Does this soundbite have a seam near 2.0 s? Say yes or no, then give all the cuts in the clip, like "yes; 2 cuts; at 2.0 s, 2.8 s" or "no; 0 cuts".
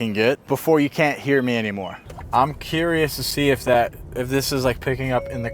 yes; 1 cut; at 2.0 s